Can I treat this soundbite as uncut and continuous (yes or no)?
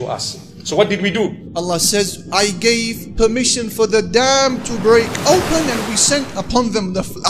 no